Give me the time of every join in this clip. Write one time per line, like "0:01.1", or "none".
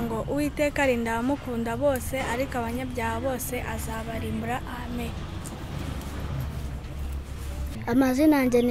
none